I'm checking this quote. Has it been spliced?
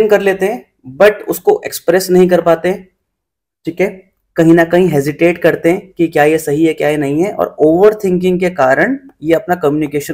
no; 0 cuts

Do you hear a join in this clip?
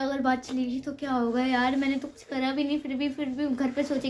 no; 0 cuts

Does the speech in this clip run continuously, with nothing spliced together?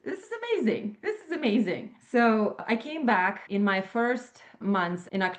no; 4 cuts; at 1.9 s, 2.6 s, 3.4 s, 4.5 s

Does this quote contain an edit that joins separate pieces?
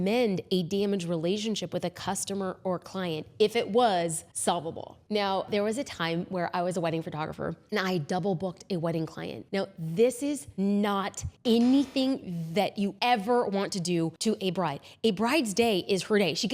yes; 5 cuts; at 4.3 s, 10.5 s, 11.2 s, 12.9 s, 14.1 s

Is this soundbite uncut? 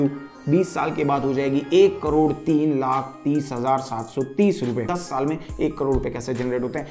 no; 1 cut; at 5.0 s

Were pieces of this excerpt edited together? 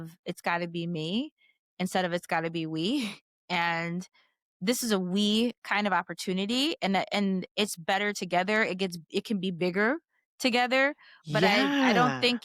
no; 0 cuts

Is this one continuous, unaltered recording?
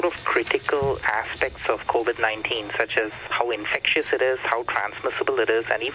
no; 1 cut; at 3.2 s

